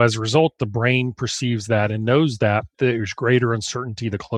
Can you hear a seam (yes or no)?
no